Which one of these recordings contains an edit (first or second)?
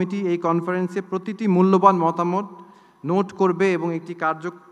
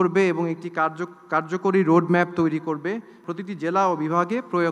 second